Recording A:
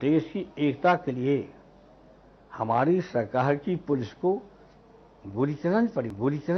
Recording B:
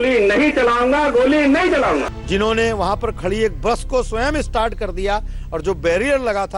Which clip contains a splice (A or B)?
B